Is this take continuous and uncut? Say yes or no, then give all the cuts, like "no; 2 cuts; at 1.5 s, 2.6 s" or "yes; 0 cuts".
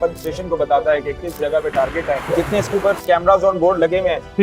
no; 1 cut; at 2.3 s